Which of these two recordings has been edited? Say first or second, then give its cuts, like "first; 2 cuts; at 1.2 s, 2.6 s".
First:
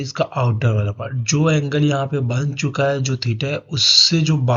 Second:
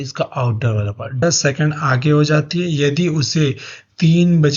second; 1 cut; at 1.2 s